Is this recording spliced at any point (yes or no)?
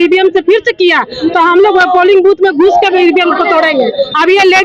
no